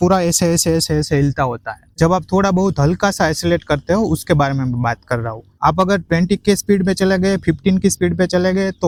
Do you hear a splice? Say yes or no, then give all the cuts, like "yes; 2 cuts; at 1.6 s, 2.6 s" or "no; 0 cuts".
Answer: no; 0 cuts